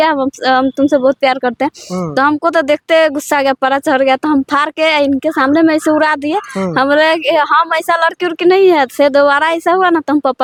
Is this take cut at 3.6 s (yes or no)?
no